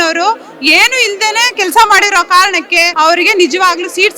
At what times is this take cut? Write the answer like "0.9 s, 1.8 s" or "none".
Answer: 2.9 s